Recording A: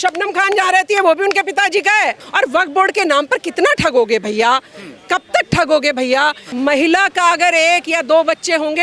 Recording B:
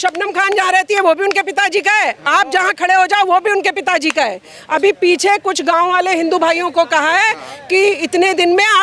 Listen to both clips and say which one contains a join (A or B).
A